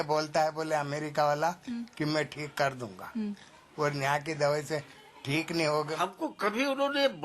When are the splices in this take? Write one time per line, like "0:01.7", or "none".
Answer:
0:06.0